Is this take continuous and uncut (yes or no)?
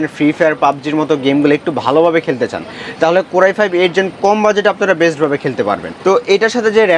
no